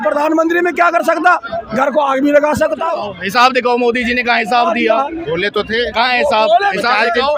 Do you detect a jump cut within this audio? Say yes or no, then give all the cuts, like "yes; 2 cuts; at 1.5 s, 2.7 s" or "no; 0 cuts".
yes; 1 cut; at 3.0 s